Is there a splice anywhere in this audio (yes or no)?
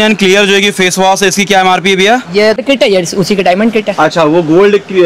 yes